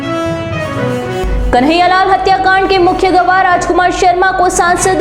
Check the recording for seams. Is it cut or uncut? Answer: cut